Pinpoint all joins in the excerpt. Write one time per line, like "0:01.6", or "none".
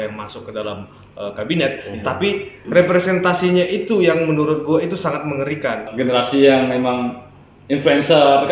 0:05.9